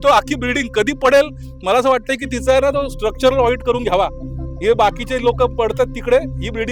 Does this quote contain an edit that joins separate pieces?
no; 0 cuts

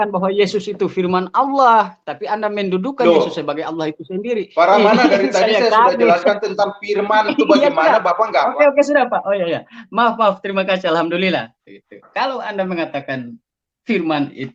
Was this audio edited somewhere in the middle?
no; 0 cuts

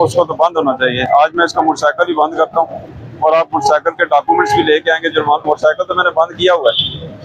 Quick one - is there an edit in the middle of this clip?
no; 0 cuts

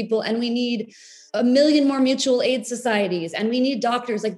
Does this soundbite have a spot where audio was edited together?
yes; 1 cut; at 1.2 s

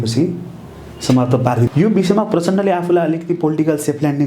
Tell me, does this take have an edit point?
yes; 1 cut; at 1.7 s

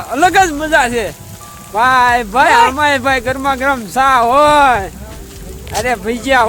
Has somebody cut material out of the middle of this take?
no; 0 cuts

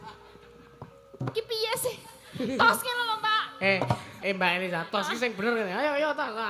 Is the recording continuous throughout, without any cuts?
no; 1 cut; at 4.1 s

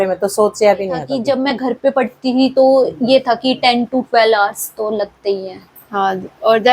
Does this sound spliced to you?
yes; 1 cut; at 1.1 s

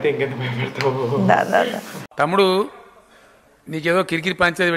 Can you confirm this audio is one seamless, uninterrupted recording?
yes; 0 cuts

